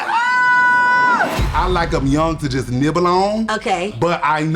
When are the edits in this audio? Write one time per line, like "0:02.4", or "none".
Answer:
0:01.4